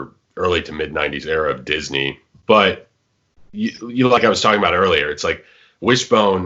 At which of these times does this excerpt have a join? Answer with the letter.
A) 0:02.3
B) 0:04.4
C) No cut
A